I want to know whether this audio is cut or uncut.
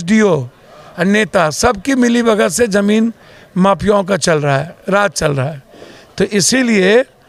uncut